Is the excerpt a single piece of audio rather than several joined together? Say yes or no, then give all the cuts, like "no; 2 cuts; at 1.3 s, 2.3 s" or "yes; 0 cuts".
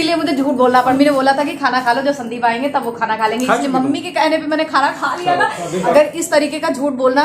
no; 2 cuts; at 0.9 s, 5.9 s